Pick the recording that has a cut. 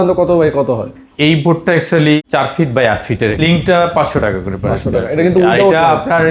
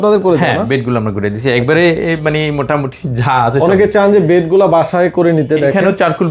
first; 2 cuts; at 2.2 s, 3.3 s

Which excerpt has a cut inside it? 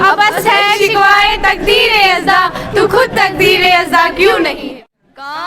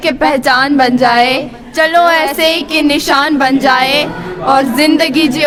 first; 1 cut; at 4.6 s

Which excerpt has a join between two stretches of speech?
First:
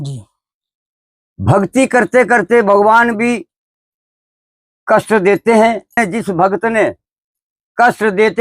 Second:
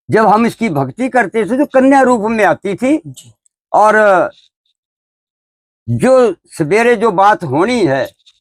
first; 1 cut; at 6.0 s

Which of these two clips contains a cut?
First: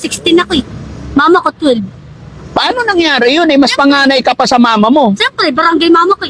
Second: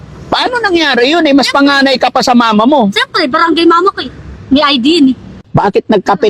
second; 1 cut; at 5.3 s

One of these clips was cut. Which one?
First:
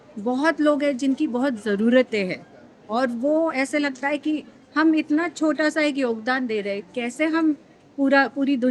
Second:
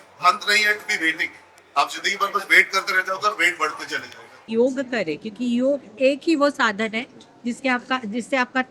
second; 1 cut; at 4.5 s

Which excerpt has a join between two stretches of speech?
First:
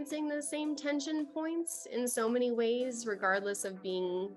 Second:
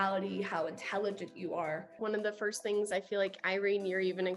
second; 1 cut; at 2.0 s

